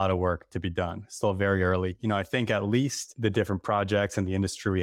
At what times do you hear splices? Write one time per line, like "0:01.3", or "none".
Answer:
0:03.1